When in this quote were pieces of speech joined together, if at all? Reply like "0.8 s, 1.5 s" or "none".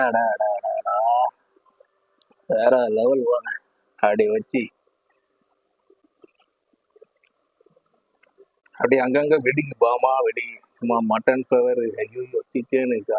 8.6 s